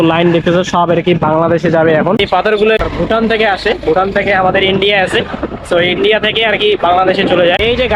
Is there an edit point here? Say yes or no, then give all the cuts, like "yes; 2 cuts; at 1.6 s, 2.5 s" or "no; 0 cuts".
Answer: no; 0 cuts